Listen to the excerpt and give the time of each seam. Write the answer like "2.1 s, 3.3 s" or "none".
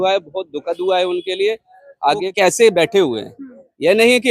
2.2 s